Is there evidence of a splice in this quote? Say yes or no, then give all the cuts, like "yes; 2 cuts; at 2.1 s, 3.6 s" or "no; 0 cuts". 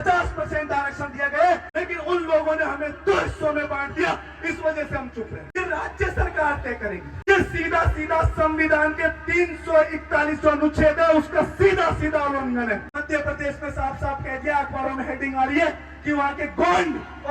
yes; 4 cuts; at 1.7 s, 5.5 s, 7.1 s, 12.9 s